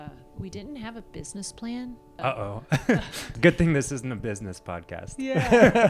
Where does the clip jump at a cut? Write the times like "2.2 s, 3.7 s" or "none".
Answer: 2.2 s, 3.3 s